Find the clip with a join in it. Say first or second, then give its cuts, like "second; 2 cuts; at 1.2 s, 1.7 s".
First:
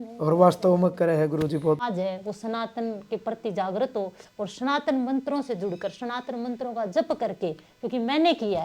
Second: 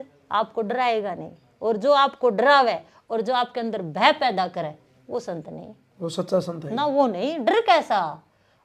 first; 1 cut; at 1.8 s